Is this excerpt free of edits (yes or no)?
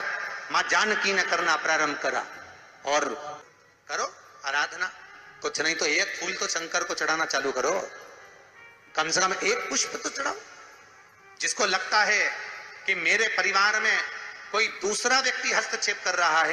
no